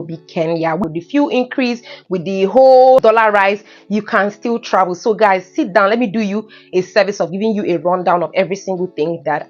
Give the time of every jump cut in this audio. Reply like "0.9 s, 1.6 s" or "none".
0.8 s, 3.0 s